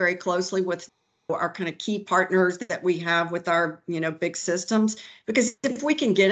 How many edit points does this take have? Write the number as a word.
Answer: zero